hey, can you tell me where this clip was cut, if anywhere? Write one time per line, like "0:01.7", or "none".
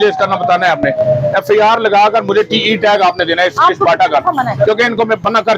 none